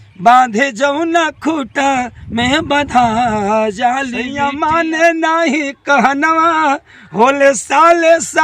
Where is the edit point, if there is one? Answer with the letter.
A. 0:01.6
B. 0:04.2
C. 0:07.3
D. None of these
B